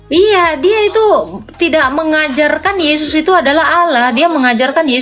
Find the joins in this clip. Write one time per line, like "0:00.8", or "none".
none